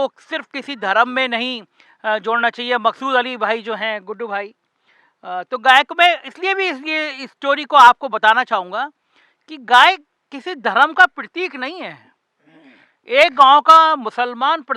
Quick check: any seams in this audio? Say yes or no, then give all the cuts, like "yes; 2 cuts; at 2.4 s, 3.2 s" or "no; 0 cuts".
no; 0 cuts